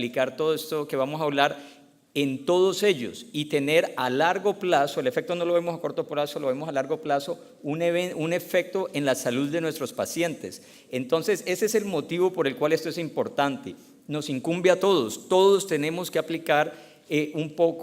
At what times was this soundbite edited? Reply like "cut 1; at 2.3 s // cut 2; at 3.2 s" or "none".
cut 1; at 4.0 s